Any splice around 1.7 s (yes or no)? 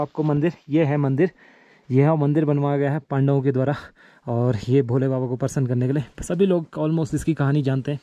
no